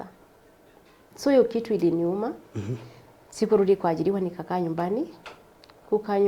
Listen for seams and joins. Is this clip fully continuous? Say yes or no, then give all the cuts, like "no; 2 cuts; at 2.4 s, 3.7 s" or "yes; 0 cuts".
no; 1 cut; at 1.1 s